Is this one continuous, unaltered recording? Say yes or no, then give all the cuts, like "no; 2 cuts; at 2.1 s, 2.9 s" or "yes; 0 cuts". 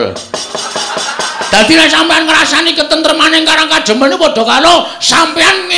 no; 1 cut; at 2.0 s